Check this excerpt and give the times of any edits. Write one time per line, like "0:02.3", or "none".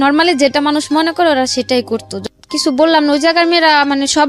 0:02.1